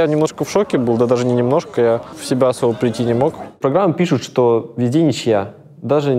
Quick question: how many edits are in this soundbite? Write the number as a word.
two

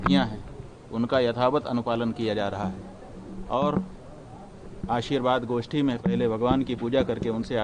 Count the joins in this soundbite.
zero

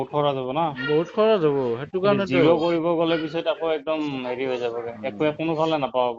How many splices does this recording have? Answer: zero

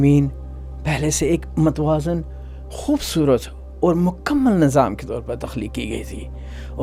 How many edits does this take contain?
zero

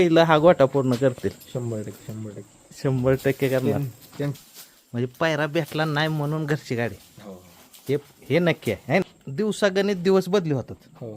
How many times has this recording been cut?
two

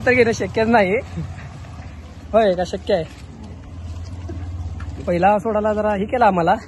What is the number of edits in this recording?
one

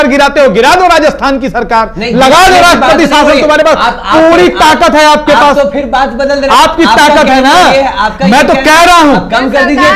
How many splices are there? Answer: zero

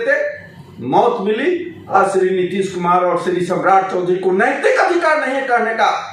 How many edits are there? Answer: one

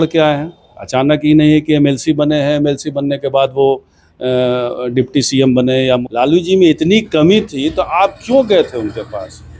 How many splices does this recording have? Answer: one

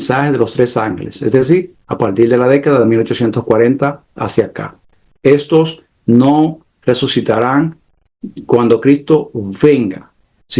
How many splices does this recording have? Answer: zero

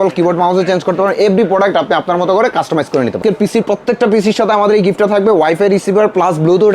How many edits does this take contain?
one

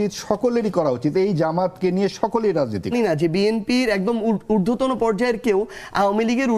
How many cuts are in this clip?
one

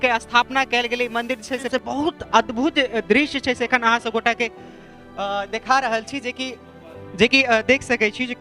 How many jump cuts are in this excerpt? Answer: one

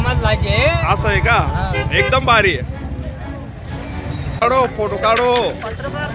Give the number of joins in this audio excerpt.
one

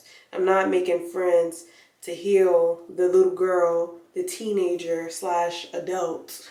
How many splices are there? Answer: zero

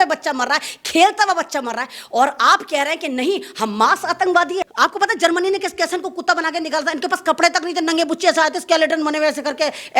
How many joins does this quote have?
one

